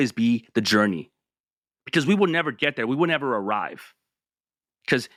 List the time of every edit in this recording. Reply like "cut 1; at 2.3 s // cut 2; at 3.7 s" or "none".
none